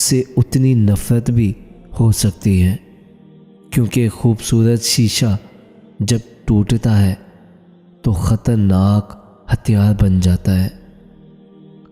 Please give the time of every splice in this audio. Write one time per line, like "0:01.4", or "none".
0:10.8